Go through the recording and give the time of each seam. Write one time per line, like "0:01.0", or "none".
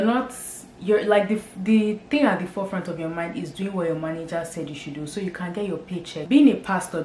0:06.2